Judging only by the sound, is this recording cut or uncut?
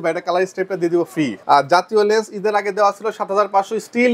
cut